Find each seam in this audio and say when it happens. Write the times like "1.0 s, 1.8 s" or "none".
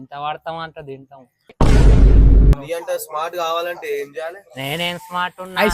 2.6 s